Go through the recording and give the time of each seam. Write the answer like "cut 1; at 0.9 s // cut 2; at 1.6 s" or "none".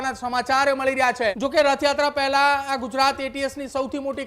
cut 1; at 1.4 s